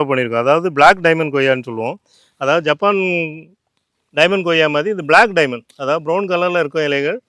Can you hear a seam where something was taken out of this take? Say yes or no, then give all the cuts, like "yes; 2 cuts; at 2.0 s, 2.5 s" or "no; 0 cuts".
no; 0 cuts